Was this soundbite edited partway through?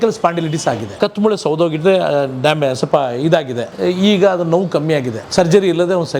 yes; 3 cuts; at 0.9 s, 3.7 s, 5.2 s

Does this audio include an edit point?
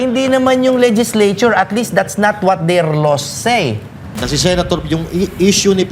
yes; 1 cut; at 4.2 s

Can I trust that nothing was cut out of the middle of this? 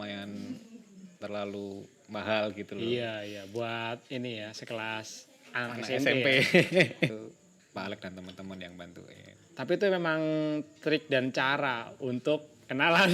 no; 1 cut; at 7.2 s

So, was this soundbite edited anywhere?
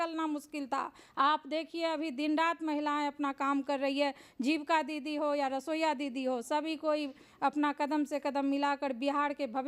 no; 0 cuts

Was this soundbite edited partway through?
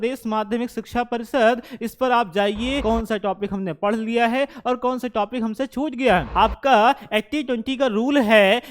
yes; 2 cuts; at 2.8 s, 6.3 s

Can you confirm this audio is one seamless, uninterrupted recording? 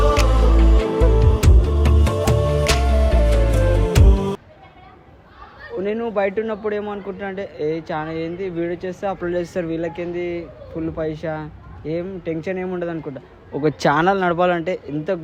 yes; 0 cuts

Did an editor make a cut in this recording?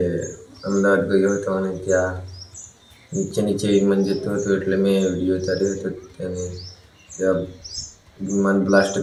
no; 0 cuts

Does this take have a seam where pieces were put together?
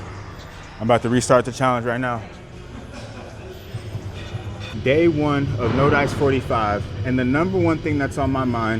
yes; 1 cut; at 4.6 s

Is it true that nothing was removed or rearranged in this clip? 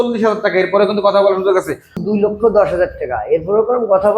no; 1 cut; at 2.0 s

